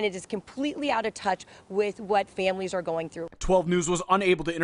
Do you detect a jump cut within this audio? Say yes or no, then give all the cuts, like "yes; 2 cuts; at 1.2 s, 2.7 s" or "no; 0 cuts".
yes; 1 cut; at 3.2 s